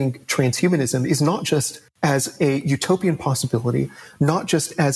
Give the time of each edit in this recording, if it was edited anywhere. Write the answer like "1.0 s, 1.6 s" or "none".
none